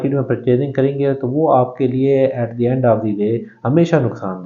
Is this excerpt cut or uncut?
uncut